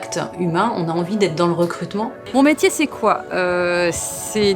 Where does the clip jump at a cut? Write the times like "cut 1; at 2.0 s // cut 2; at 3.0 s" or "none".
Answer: cut 1; at 2.2 s

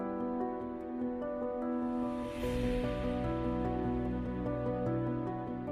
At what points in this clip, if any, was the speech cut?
none

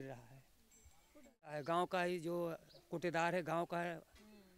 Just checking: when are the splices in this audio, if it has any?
cut 1; at 1.5 s

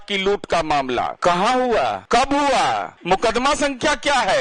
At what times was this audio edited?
cut 1; at 1.2 s // cut 2; at 2.0 s // cut 3; at 2.9 s

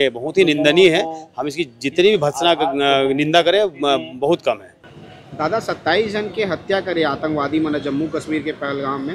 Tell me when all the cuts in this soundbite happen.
none

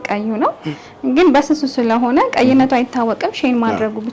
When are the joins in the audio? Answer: none

